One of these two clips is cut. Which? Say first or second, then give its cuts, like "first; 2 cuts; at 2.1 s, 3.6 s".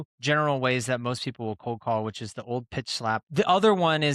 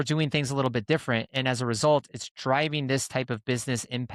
first; 1 cut; at 3.0 s